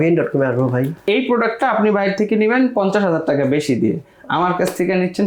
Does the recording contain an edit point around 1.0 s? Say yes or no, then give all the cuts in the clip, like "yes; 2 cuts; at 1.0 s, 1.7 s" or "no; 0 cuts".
yes; 1 cut; at 1.0 s